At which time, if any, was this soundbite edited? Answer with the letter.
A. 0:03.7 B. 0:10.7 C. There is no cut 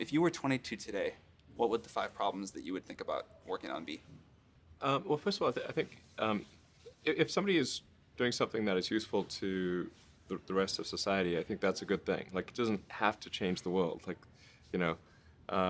C